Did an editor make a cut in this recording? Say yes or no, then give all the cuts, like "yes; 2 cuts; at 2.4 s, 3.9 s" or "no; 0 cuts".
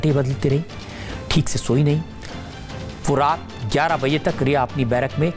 no; 0 cuts